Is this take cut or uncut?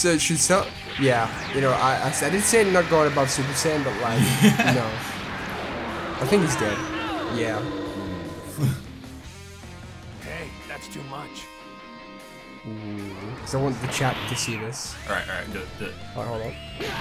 cut